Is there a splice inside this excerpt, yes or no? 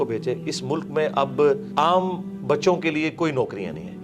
yes